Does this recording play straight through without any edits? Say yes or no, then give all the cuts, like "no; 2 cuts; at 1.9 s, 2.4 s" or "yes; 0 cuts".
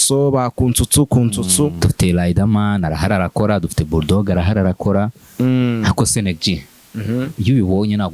no; 1 cut; at 1.8 s